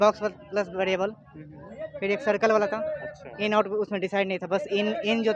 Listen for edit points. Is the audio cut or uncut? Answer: uncut